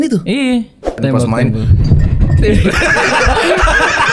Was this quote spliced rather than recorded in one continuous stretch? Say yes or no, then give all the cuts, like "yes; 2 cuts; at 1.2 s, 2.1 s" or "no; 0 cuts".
yes; 1 cut; at 1.0 s